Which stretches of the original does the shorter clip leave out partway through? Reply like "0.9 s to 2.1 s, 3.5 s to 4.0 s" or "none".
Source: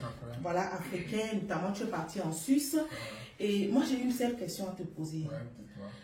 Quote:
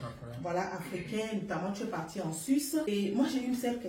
2.9 s to 3.4 s